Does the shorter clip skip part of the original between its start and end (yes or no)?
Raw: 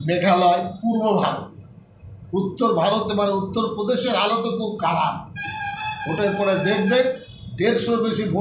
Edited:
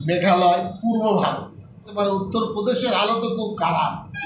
yes